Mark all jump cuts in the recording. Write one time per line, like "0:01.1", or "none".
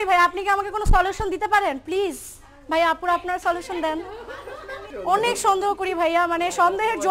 0:04.8

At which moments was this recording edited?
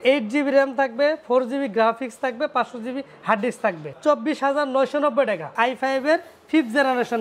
0:03.9
0:05.5

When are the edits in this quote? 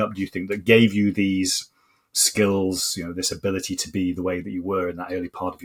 none

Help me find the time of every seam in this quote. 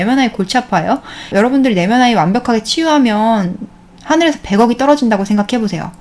0:01.3

